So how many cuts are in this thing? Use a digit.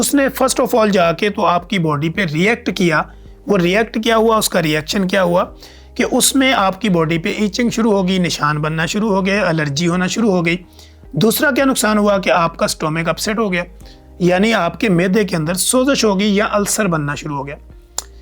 0